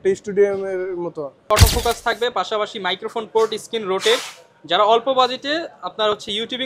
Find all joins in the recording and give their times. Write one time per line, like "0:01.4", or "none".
0:01.5